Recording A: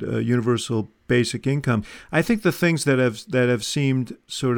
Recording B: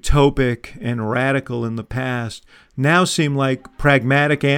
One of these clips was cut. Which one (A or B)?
A